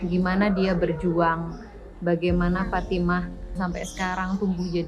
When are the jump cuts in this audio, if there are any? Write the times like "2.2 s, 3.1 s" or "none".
3.6 s